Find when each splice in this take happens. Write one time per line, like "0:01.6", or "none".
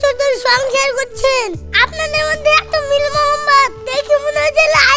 none